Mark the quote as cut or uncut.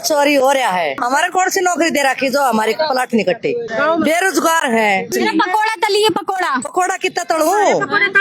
cut